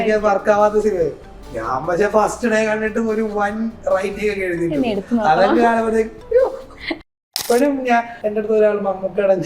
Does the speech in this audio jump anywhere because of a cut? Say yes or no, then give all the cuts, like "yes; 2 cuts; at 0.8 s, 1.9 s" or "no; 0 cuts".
yes; 2 cuts; at 7.1 s, 8.2 s